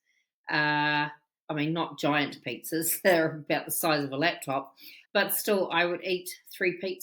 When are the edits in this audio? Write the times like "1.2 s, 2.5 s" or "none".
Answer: 5.0 s